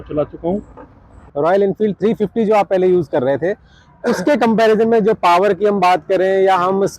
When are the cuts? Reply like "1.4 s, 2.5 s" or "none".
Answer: 1.2 s